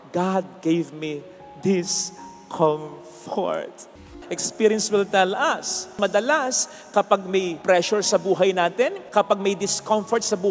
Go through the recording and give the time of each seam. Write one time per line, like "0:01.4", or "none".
0:04.1
0:05.9
0:07.5
0:09.0

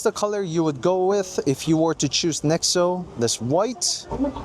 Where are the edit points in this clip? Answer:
none

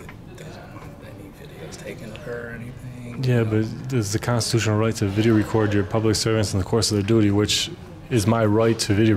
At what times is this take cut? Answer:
none

